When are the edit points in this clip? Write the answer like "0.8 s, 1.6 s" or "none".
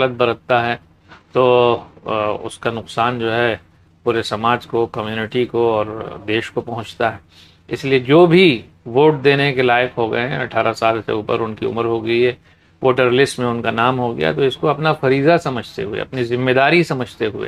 none